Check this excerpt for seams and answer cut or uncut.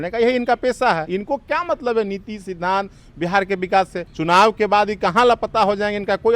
cut